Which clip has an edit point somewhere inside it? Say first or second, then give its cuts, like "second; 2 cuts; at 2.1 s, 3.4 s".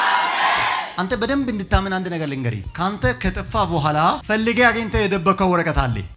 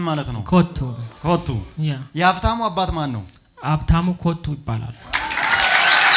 first; 3 cuts; at 0.9 s, 2.6 s, 4.2 s